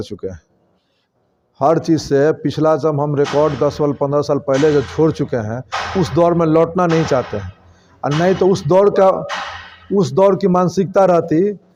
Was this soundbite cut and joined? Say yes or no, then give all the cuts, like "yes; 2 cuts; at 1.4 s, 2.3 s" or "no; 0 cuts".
no; 0 cuts